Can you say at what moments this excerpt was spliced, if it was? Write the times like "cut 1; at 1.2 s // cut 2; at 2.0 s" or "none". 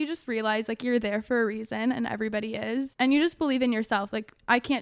cut 1; at 2.9 s